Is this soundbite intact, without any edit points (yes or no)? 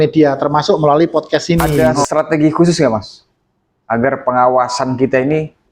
no